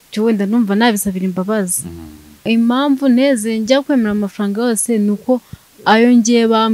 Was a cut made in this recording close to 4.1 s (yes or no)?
no